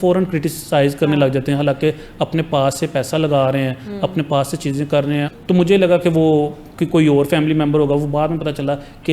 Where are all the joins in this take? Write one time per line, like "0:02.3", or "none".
0:05.3